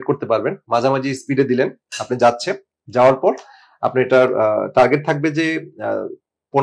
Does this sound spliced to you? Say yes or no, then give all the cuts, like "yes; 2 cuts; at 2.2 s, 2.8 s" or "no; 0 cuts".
no; 0 cuts